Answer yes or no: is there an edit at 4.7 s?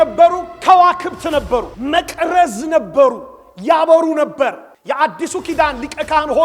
yes